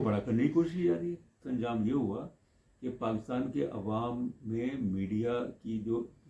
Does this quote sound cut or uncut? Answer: cut